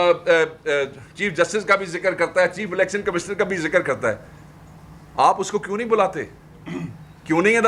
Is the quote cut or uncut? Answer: uncut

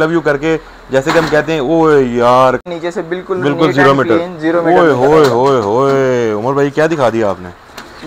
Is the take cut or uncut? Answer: cut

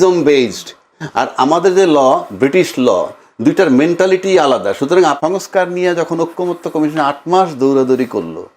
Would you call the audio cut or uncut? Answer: cut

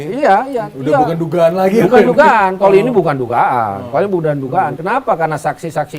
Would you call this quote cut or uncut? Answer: uncut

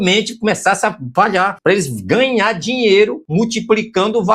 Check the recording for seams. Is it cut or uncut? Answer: cut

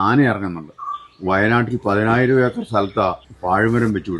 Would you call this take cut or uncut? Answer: cut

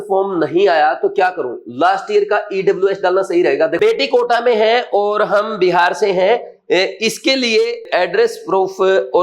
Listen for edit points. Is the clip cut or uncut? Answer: cut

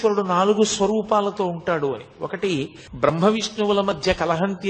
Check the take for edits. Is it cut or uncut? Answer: cut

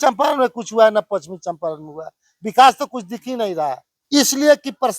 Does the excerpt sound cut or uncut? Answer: cut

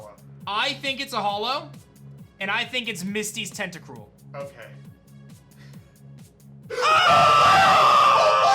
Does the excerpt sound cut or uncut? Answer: cut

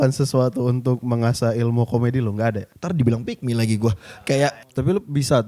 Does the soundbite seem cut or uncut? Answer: cut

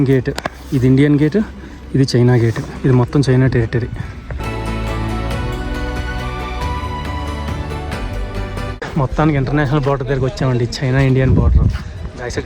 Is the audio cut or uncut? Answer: uncut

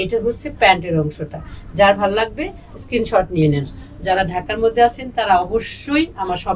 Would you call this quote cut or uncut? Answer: uncut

